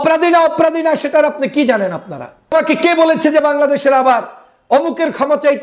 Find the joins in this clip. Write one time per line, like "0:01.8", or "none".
0:02.5